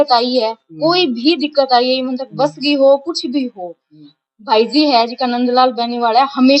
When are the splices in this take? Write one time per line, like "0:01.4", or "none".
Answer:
none